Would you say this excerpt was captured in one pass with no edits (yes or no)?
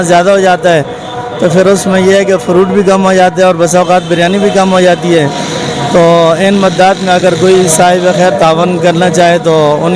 yes